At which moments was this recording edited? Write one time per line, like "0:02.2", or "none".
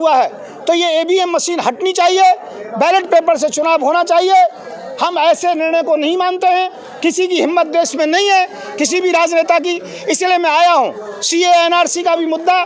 none

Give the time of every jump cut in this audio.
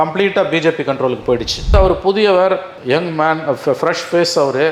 0:01.7

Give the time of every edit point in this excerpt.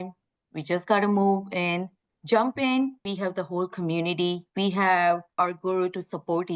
0:03.1
0:05.3

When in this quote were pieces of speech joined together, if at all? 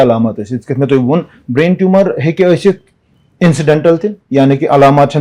none

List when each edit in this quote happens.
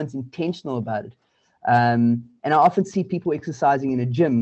none

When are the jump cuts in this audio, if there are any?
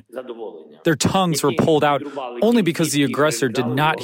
none

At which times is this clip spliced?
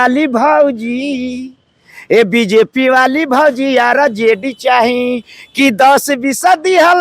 none

